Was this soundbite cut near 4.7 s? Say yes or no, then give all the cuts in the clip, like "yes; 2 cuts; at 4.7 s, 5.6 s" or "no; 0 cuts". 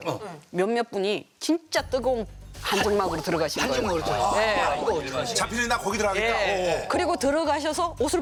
no; 0 cuts